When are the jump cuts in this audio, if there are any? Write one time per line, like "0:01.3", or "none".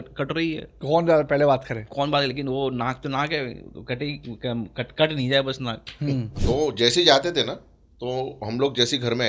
0:06.3